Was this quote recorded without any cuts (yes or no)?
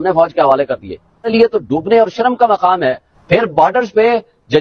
no